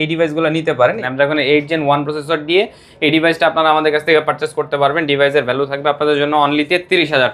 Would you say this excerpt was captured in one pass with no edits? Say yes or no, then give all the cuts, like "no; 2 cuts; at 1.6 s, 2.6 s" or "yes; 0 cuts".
no; 1 cut; at 1.0 s